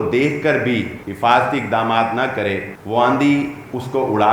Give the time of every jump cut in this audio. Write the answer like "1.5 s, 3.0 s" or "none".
1.0 s, 2.7 s